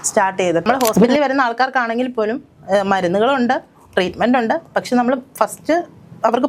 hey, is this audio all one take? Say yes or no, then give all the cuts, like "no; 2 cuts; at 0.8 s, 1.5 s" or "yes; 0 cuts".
no; 1 cut; at 1.1 s